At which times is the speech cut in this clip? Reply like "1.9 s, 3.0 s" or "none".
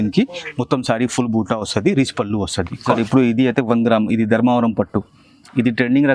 2.9 s

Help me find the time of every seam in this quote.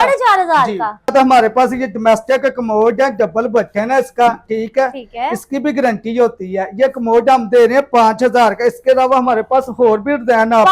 1.1 s

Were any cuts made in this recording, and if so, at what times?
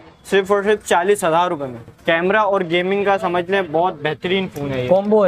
1.9 s

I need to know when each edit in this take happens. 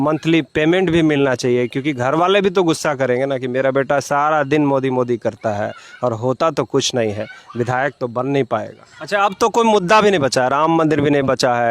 8.9 s

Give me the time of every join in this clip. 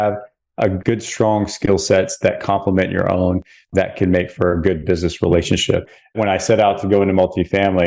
3.6 s, 6.1 s

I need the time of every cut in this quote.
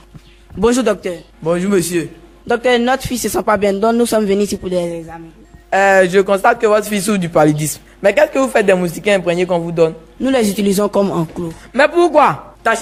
none

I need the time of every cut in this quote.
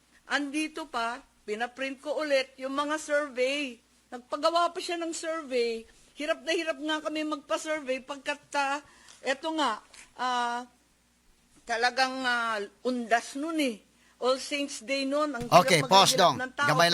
none

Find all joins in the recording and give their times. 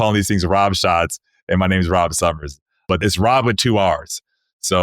2.9 s

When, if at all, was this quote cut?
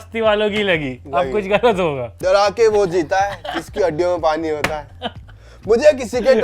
2.1 s

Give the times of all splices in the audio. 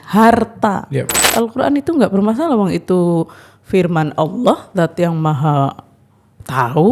1.2 s

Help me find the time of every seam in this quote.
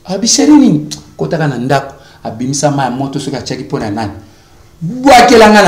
none

